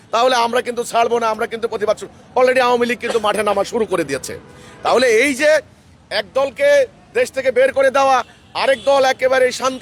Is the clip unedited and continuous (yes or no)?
yes